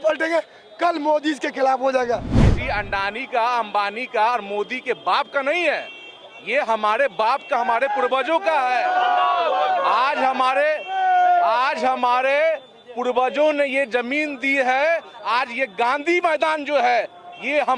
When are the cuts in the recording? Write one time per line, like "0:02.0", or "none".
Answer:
0:02.4